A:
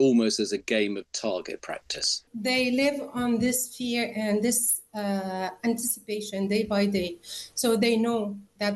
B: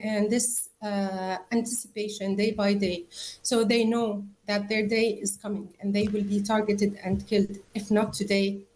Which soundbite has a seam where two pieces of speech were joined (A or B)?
A